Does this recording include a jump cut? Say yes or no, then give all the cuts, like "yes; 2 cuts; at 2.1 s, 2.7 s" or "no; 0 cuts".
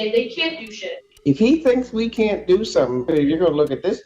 yes; 2 cuts; at 1.1 s, 3.1 s